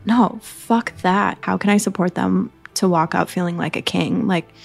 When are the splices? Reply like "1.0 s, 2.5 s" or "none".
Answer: 1.4 s